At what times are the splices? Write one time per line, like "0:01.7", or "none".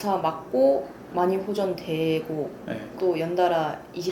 0:02.8